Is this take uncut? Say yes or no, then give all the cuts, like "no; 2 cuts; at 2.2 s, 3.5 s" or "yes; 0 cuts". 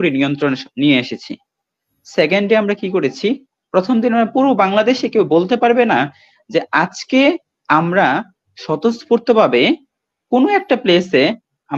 yes; 0 cuts